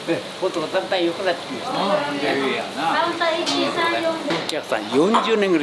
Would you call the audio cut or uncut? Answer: cut